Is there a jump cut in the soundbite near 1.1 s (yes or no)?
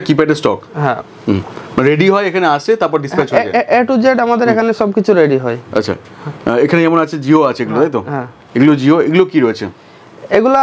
no